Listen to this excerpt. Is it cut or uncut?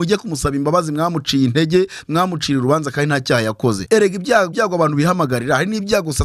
cut